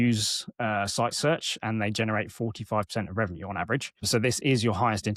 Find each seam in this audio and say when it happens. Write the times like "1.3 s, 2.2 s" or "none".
none